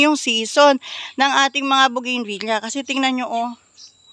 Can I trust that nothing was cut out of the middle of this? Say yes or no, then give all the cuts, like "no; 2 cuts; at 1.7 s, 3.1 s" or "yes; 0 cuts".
yes; 0 cuts